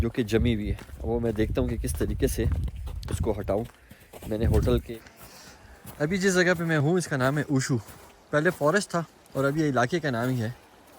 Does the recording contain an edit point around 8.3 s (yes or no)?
no